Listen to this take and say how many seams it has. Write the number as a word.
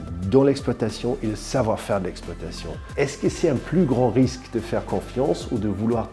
one